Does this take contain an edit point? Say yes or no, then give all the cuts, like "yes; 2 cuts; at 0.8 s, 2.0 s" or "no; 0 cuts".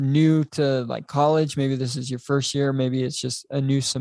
no; 0 cuts